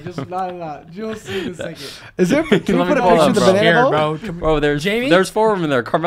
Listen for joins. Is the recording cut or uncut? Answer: uncut